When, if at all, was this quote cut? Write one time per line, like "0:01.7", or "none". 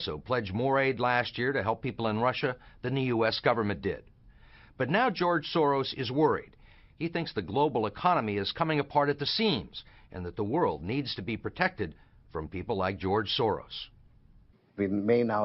0:04.6